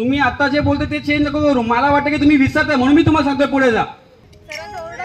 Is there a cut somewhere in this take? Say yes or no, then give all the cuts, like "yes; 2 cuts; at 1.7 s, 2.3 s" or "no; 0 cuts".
no; 0 cuts